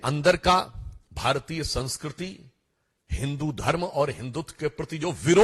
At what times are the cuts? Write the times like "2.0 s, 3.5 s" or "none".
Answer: none